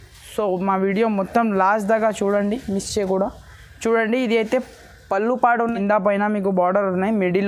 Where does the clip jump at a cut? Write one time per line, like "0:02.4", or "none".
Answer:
0:05.8